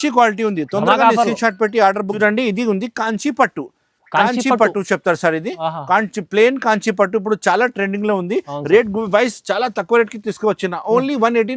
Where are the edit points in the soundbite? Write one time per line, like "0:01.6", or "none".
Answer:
0:02.1